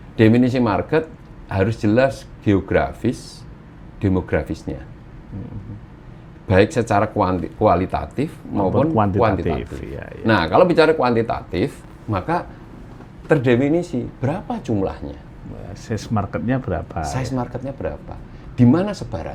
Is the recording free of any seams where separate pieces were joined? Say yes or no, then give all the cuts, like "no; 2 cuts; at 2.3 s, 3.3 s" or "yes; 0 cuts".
yes; 0 cuts